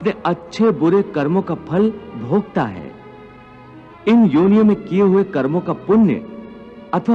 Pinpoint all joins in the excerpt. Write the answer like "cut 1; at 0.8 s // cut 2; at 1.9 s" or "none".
cut 1; at 3.8 s